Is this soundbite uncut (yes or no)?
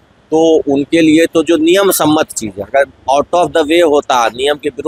yes